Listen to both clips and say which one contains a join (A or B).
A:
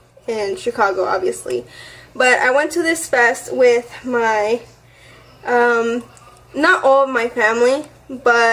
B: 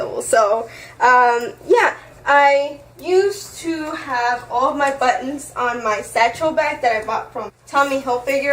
B